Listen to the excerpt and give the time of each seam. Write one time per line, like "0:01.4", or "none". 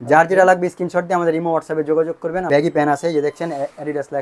0:02.4